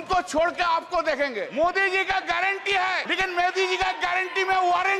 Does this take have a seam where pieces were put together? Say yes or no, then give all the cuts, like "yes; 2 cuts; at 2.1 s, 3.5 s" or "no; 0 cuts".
yes; 2 cuts; at 1.5 s, 3.1 s